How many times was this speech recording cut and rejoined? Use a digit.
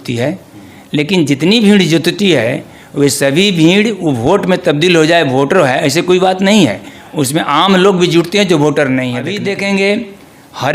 1